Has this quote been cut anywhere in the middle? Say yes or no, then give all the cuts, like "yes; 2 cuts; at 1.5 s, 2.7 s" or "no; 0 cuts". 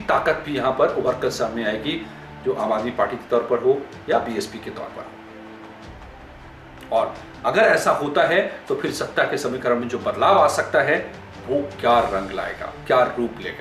no; 0 cuts